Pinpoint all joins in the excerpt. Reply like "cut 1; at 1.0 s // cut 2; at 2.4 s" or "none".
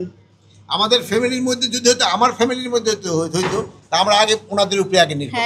none

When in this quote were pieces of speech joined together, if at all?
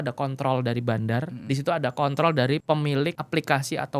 cut 1; at 1.3 s // cut 2; at 2.9 s

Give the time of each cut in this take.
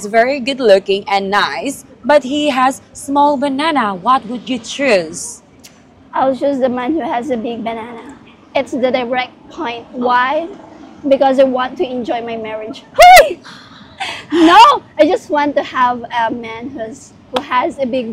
none

